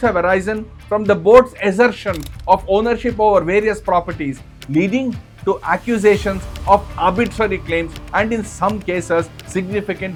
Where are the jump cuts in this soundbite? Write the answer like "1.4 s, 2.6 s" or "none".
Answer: none